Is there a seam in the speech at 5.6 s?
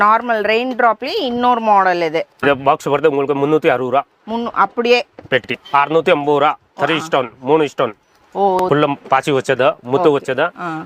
yes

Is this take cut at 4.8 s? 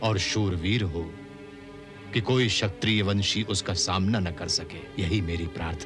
yes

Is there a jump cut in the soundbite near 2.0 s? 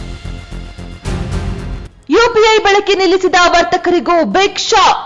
yes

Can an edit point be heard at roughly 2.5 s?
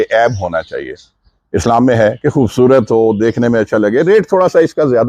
no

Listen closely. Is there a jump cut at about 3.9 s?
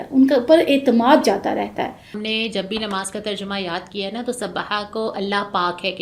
no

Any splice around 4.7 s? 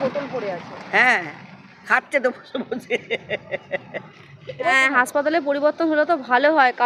yes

